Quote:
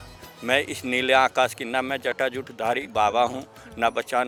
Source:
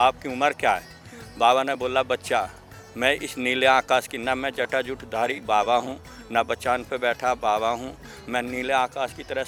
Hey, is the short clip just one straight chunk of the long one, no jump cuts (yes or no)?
yes